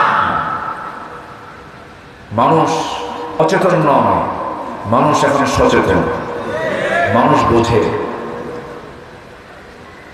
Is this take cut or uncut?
cut